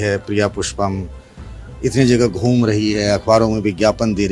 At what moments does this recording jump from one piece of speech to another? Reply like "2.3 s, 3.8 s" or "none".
none